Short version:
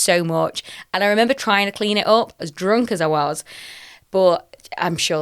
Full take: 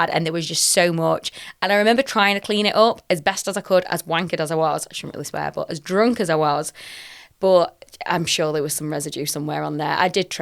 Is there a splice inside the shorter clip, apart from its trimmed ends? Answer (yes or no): yes